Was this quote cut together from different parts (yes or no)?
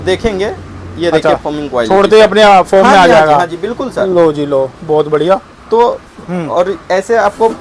no